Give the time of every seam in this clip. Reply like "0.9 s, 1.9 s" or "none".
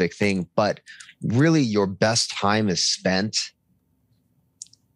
none